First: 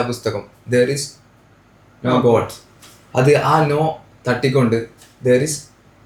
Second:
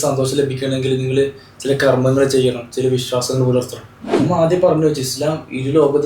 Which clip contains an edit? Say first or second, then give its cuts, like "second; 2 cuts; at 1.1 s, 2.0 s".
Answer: second; 1 cut; at 4.2 s